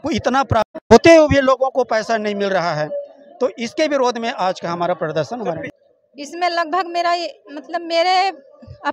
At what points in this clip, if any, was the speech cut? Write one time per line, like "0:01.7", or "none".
0:05.7

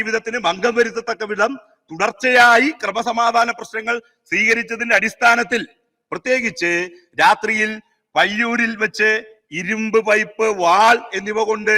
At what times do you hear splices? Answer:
none

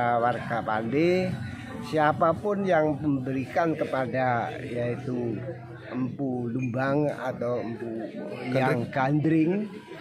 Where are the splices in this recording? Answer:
none

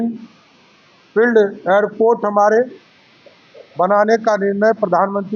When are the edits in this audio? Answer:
none

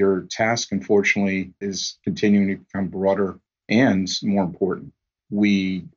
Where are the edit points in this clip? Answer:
0:01.6

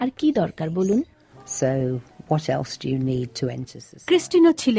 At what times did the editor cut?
0:03.3

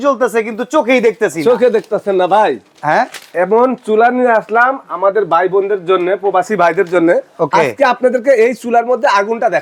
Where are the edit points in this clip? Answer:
none

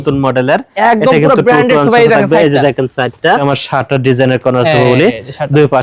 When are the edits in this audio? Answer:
0:03.4

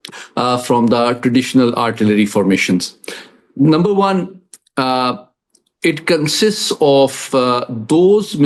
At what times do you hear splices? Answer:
none

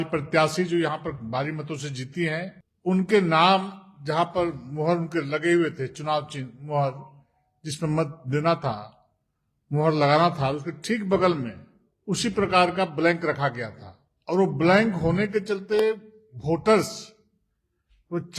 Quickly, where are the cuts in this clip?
0:02.6

